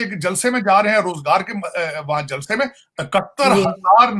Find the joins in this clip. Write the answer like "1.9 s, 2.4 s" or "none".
none